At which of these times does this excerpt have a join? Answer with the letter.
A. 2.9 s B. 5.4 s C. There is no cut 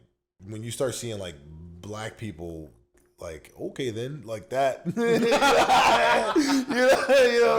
C